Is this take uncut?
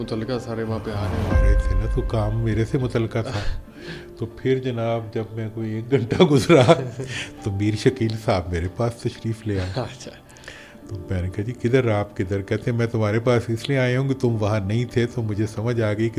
yes; 0 cuts

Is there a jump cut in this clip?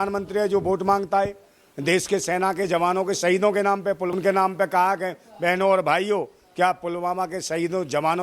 yes; 1 cut; at 4.1 s

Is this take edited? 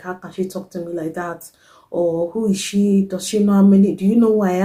no; 0 cuts

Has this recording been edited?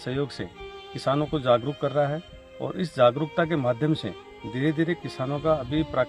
no; 0 cuts

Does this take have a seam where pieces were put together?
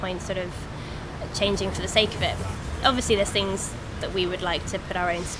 yes; 1 cut; at 2.5 s

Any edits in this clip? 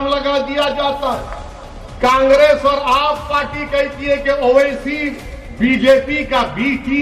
no; 0 cuts

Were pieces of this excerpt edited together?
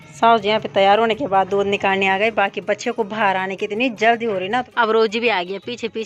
yes; 1 cut; at 4.7 s

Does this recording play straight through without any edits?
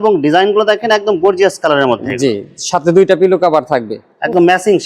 yes; 0 cuts

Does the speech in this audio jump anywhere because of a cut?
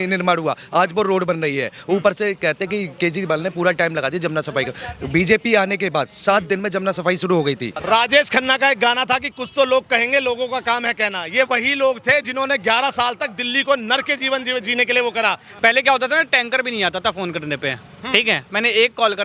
yes; 2 cuts; at 7.8 s, 15.5 s

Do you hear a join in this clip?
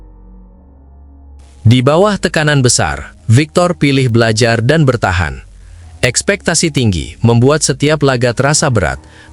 yes; 1 cut; at 1.6 s

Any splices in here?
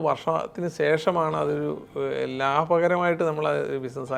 no; 0 cuts

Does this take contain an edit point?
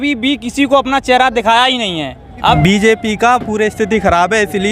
yes; 1 cut; at 2.4 s

